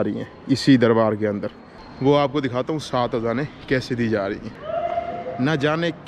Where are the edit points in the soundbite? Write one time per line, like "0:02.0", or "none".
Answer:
0:04.5